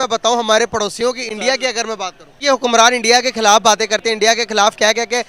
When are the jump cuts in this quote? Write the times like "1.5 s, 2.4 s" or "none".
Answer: 2.2 s